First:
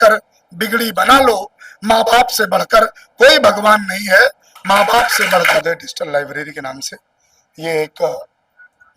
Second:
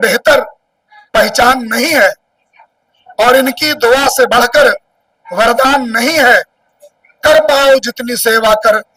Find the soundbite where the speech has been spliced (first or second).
first